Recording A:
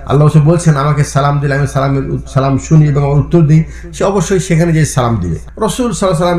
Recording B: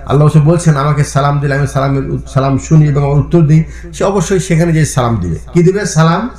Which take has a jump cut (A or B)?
A